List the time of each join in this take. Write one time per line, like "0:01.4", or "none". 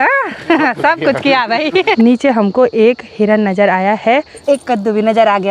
0:01.9
0:04.3